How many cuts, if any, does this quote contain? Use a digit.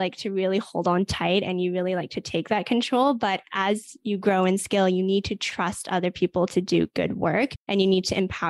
1